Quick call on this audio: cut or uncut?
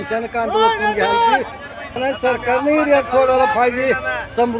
cut